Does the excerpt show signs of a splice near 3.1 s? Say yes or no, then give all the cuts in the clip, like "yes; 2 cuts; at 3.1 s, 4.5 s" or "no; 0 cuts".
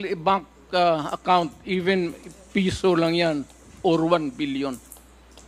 no; 0 cuts